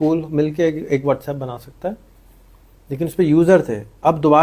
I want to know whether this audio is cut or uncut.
uncut